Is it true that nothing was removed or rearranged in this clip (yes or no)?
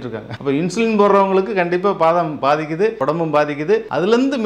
yes